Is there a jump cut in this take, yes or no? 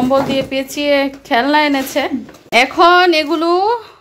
yes